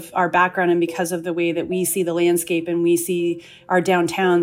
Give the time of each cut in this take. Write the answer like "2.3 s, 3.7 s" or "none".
none